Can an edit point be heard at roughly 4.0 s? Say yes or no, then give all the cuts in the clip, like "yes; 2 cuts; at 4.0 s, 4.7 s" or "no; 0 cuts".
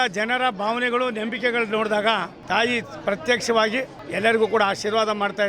yes; 2 cuts; at 2.3 s, 4.0 s